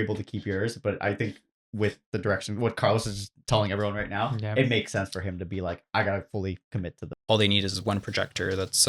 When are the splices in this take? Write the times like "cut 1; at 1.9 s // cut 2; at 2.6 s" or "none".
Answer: cut 1; at 7.0 s